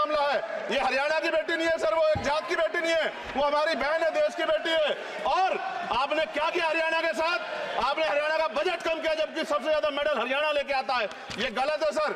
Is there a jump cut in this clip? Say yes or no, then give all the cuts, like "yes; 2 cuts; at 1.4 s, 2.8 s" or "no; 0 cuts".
no; 0 cuts